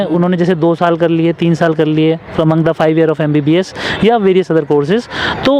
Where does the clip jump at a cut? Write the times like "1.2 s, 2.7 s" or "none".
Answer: none